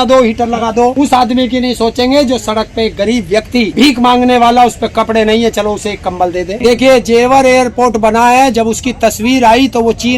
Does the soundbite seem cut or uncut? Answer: cut